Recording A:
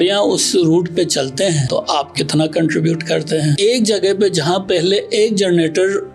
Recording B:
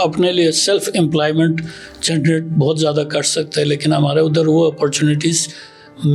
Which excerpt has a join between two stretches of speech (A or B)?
A